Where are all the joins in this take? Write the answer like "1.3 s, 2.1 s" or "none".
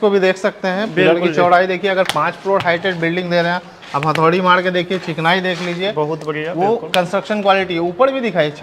none